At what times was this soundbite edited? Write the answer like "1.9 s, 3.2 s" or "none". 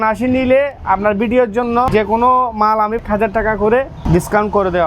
1.9 s, 3.0 s, 4.0 s